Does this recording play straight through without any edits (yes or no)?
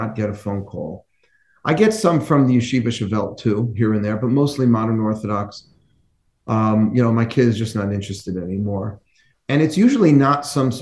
yes